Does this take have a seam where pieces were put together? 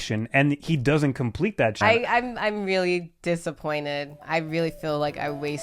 yes; 1 cut; at 1.8 s

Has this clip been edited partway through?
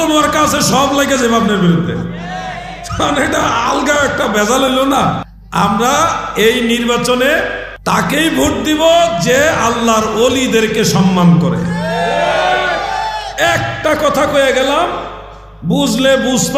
no; 0 cuts

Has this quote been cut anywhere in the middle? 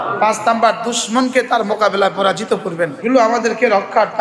yes; 1 cut; at 3.0 s

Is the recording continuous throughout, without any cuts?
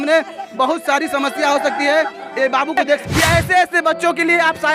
no; 1 cut; at 3.0 s

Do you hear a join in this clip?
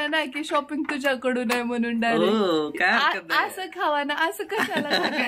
no; 0 cuts

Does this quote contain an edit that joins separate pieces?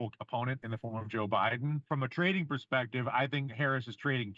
yes; 1 cut; at 1.8 s

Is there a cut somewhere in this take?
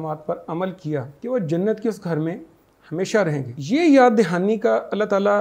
yes; 2 cuts; at 1.1 s, 3.5 s

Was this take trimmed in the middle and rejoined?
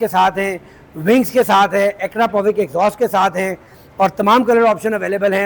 no; 0 cuts

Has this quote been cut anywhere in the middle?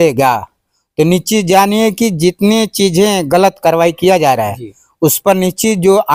no; 0 cuts

